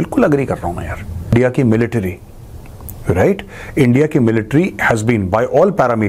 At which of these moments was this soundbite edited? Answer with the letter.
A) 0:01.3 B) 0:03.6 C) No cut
A